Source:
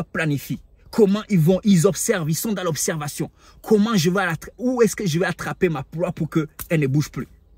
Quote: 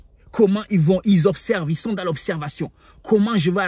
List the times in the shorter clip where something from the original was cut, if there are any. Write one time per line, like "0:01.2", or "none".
none